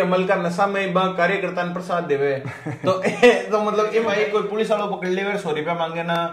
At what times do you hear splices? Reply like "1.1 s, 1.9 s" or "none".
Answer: 4.1 s